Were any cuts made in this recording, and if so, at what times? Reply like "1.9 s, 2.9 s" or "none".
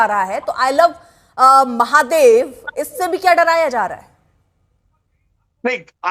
none